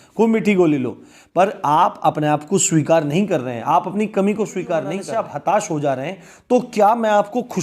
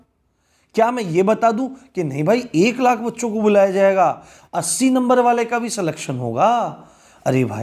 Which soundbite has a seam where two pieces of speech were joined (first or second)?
first